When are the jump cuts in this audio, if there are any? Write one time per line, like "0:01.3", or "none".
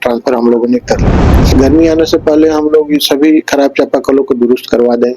0:01.5